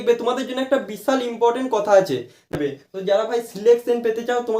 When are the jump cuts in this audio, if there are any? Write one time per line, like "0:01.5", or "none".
0:02.5